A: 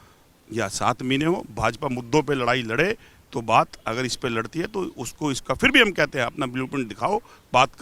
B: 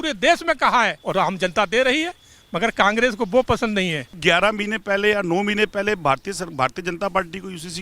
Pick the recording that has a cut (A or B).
B